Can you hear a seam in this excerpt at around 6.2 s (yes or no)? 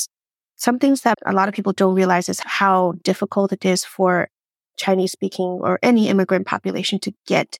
no